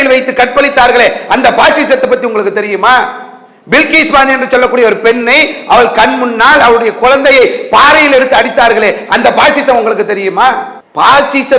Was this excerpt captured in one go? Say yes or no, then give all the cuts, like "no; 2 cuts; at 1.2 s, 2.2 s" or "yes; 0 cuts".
yes; 0 cuts